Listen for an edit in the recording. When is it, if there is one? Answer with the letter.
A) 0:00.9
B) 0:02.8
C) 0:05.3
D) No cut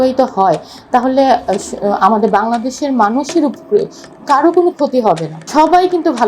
C